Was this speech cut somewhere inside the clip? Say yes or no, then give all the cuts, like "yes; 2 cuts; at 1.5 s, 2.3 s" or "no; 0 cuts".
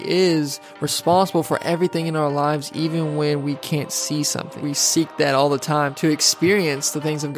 yes; 2 cuts; at 4.5 s, 5.9 s